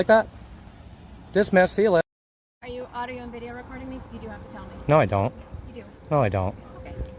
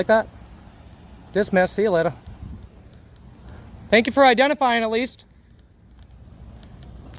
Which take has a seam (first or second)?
first